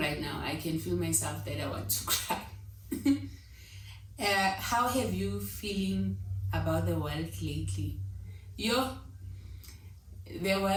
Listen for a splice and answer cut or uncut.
uncut